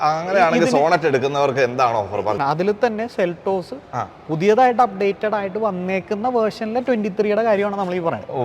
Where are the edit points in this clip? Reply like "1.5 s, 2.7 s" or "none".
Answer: 2.4 s

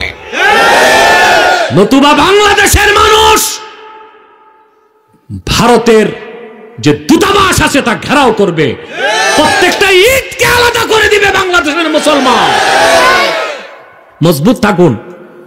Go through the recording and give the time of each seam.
none

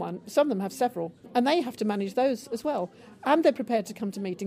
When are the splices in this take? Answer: 1.3 s

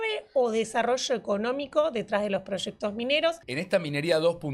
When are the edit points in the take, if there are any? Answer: 3.4 s

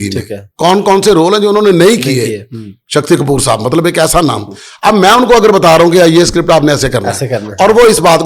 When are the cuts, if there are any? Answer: none

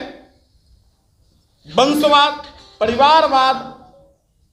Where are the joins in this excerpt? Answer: none

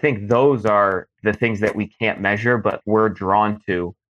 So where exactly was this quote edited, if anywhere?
1.1 s, 2.8 s

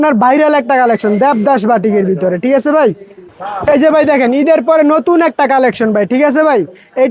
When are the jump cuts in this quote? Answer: 3.3 s

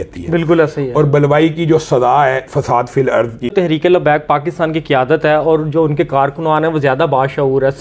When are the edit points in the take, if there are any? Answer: 3.5 s

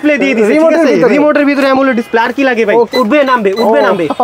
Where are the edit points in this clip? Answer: 2.9 s

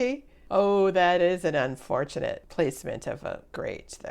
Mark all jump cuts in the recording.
2.5 s

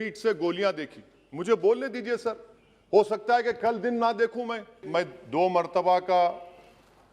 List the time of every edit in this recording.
4.8 s

